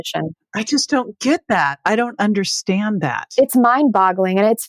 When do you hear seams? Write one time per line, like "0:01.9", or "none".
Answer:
none